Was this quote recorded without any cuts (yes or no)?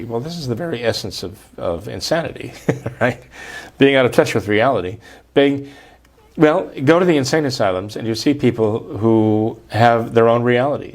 yes